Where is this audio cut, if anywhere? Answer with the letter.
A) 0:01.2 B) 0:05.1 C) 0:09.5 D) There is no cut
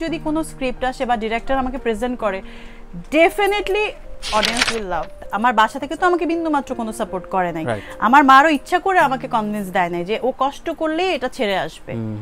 B